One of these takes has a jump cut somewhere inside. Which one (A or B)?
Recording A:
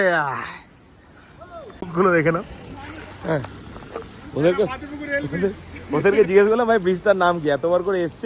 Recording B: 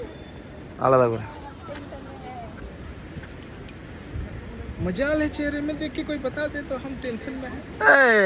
A